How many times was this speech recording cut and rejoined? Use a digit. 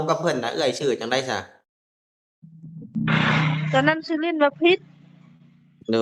0